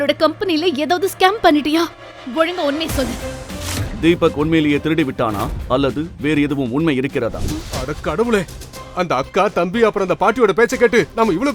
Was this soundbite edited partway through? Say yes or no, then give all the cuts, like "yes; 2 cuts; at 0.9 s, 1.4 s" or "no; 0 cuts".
yes; 1 cut; at 7.4 s